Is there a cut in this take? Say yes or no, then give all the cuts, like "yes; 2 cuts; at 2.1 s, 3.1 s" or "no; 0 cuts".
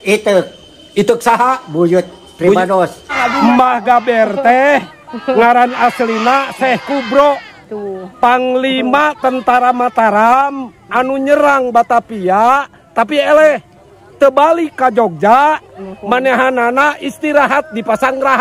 yes; 1 cut; at 3.0 s